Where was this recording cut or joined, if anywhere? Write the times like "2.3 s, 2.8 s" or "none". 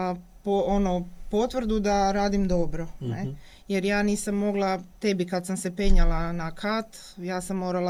none

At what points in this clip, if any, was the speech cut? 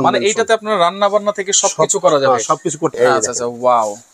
2.9 s

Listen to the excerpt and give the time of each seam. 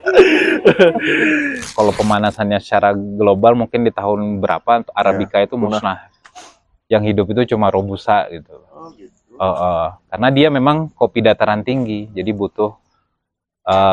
1.6 s

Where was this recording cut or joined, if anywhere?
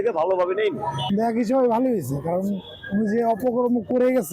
1.0 s

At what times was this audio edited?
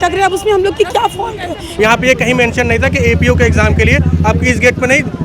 1.7 s

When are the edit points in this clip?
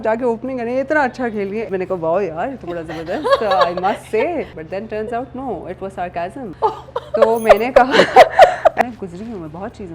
1.7 s, 4.6 s, 6.5 s, 8.8 s

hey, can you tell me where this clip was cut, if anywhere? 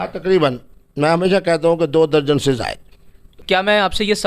3.3 s

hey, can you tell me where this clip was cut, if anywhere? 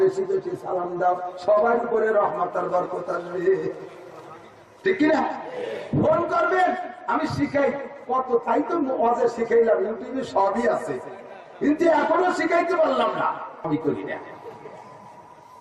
13.6 s

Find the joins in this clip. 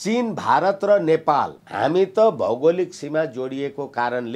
1.6 s

